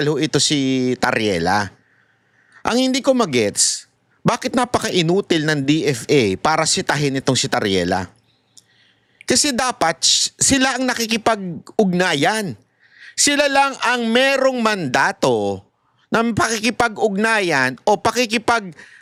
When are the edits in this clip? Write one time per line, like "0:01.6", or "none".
none